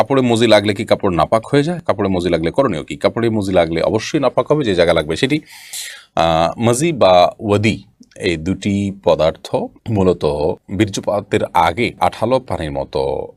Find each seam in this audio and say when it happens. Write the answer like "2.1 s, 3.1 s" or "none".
none